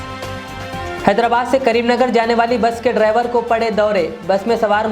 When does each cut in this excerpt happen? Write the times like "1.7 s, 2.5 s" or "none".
1.0 s